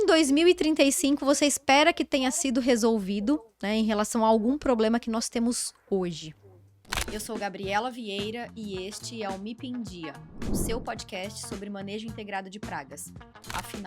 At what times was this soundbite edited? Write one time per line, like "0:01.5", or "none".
0:06.8